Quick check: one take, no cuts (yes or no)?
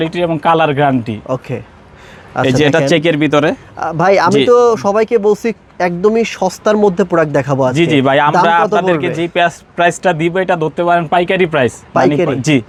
yes